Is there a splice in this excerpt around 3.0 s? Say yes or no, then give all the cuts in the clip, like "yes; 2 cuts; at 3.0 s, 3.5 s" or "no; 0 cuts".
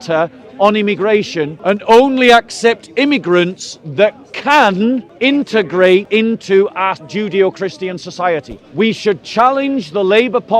no; 5 cuts; at 1.5 s, 5.1 s, 6.1 s, 7.0 s, 8.6 s